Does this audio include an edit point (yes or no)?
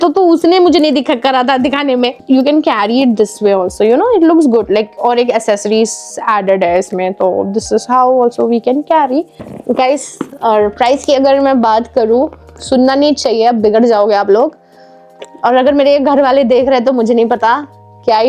no